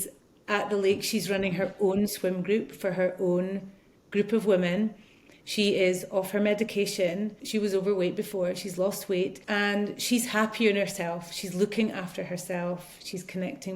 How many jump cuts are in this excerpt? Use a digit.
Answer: 2